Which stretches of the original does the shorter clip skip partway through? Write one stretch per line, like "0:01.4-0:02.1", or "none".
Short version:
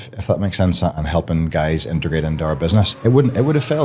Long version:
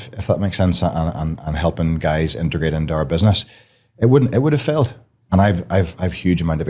0:00.9-0:01.4
0:03.4-0:03.9